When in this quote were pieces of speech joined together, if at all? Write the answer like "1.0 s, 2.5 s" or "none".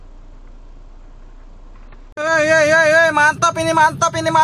2.1 s